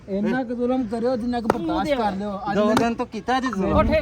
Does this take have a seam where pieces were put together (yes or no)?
no